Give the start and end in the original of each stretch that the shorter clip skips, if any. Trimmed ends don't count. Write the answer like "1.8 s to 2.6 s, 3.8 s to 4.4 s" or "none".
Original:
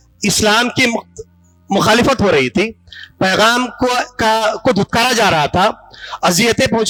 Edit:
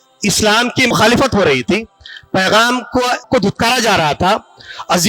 0.9 s to 1.8 s, 4.1 s to 4.6 s